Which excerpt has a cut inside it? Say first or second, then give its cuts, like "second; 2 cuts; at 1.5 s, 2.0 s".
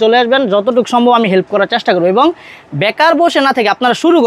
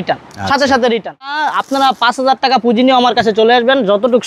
second; 1 cut; at 1.6 s